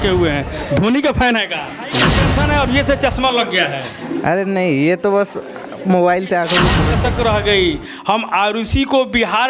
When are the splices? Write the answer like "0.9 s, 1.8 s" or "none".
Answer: 2.2 s, 6.8 s